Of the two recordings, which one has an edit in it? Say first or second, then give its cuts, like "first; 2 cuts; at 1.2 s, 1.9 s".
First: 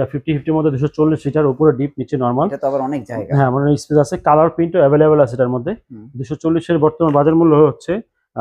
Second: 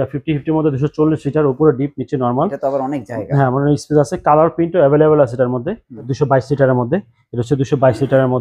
second; 1 cut; at 6.1 s